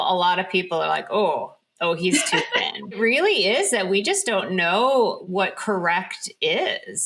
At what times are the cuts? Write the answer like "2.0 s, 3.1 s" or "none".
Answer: 3.0 s, 5.2 s